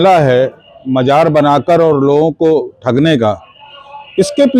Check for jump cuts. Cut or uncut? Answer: uncut